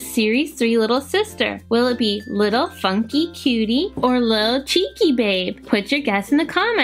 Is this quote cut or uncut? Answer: cut